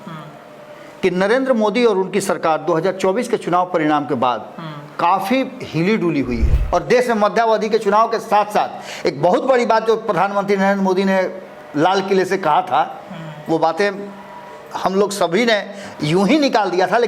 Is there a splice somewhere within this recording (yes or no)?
yes